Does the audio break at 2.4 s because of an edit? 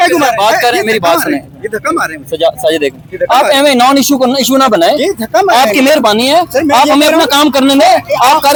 no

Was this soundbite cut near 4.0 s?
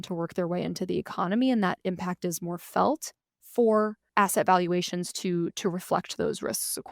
yes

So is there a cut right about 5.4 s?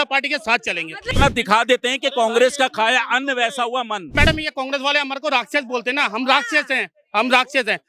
no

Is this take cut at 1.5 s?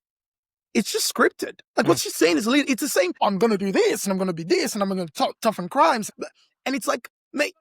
yes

